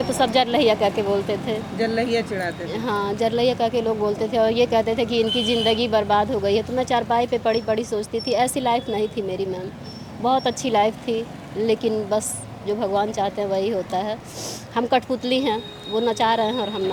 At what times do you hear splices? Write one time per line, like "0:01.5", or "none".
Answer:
none